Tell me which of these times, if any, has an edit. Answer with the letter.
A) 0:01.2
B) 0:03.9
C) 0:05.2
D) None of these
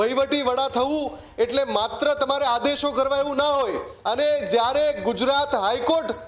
B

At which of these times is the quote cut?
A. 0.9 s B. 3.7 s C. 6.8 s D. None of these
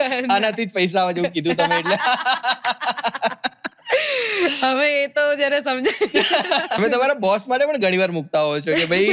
C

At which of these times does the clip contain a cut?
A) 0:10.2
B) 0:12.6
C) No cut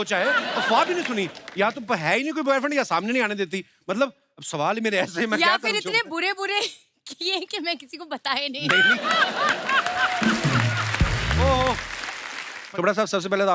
B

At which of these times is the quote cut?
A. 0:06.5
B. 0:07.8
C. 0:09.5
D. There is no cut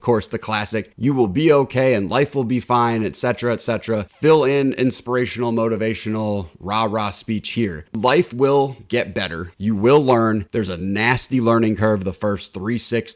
B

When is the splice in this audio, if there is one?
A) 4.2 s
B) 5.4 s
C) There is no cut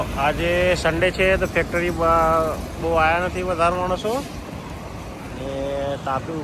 C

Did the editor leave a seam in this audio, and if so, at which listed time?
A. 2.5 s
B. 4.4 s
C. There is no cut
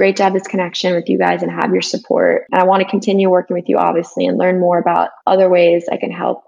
A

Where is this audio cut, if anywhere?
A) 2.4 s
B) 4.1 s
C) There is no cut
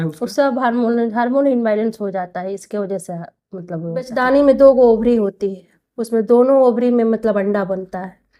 B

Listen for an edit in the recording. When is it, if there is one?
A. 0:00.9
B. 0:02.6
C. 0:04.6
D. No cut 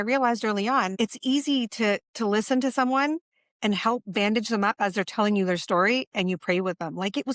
A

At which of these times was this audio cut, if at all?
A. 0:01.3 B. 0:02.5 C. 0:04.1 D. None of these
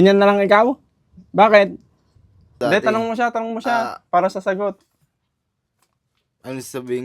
B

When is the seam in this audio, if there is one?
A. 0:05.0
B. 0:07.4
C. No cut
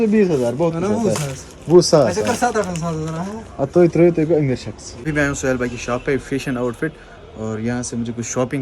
A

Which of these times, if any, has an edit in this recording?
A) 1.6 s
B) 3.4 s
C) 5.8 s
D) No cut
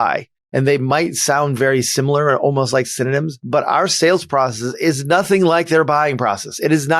D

